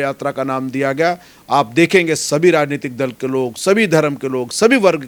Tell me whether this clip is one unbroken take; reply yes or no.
yes